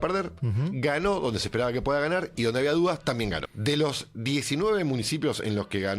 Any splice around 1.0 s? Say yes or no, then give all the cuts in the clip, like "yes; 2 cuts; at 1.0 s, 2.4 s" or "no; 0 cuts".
no; 1 cut; at 3.5 s